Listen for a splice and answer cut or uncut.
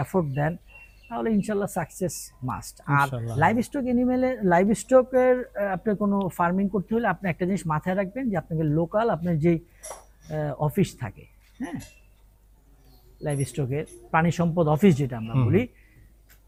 uncut